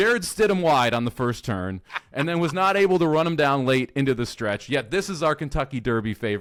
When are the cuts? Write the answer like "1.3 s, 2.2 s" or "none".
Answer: none